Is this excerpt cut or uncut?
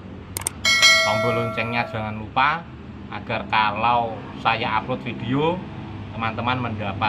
uncut